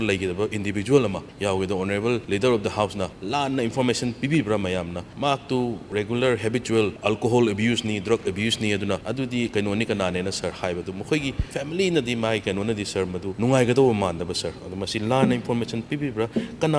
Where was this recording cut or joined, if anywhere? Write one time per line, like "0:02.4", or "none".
0:01.3
0:02.2
0:03.2
0:05.0
0:05.8
0:07.0
0:09.1
0:11.4
0:13.3